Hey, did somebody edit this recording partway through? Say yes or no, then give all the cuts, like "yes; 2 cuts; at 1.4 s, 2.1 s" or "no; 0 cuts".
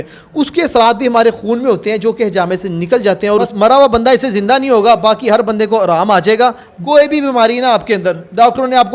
yes; 2 cuts; at 3.3 s, 6.7 s